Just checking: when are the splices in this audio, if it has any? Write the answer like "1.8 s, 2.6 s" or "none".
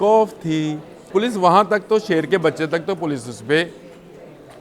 1.1 s

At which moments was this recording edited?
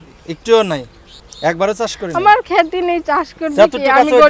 1.2 s

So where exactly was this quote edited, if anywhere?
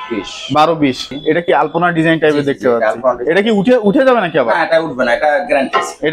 1.1 s

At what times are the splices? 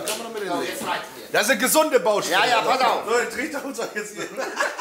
none

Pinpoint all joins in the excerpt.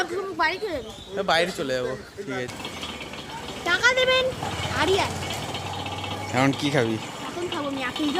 2.5 s

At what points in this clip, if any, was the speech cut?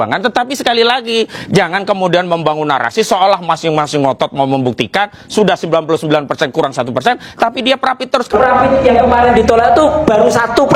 none

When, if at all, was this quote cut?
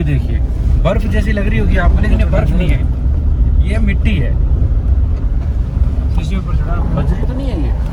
none

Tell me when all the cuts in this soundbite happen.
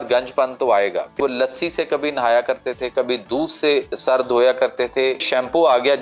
1.2 s, 3.9 s, 5.3 s

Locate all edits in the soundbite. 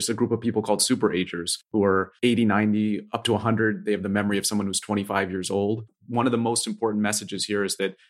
1.7 s, 5.9 s

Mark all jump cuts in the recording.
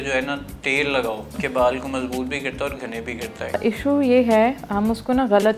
1.4 s, 3.6 s

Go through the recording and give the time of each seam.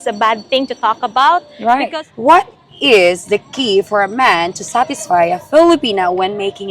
1.9 s

